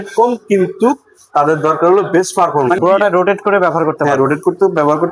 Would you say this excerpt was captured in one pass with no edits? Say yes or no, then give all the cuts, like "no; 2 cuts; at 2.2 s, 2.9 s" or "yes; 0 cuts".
no; 1 cut; at 2.8 s